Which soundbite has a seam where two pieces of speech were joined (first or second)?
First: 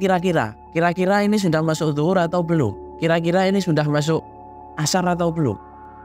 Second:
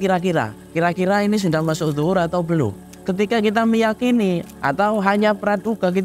second